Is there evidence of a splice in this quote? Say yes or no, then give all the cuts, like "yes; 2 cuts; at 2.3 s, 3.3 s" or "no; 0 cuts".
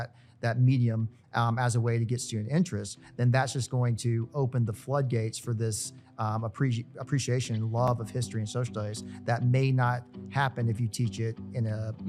no; 0 cuts